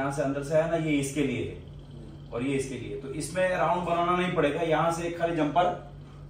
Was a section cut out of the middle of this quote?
no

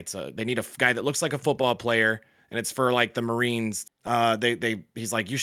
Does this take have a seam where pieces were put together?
yes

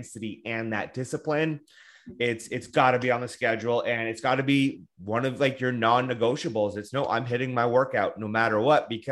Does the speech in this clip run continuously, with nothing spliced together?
yes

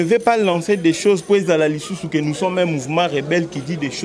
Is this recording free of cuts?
yes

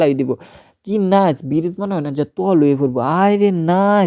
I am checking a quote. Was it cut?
no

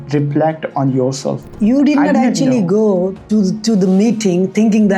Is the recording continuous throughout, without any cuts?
no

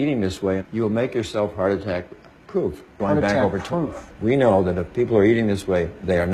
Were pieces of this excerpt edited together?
no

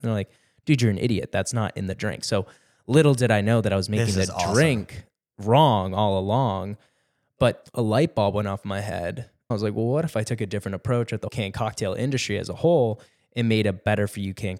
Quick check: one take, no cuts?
no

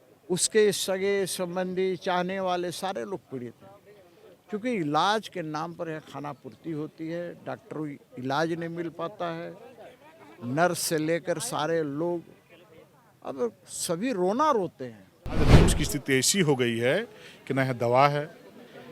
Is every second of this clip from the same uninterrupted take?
no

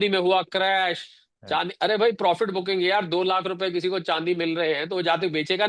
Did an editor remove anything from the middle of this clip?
no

